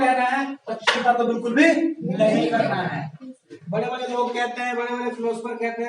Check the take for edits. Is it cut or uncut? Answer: cut